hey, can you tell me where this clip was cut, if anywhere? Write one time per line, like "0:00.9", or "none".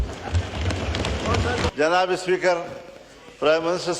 0:01.7